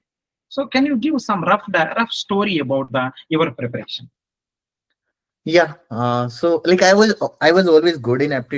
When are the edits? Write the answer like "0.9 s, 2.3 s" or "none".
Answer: none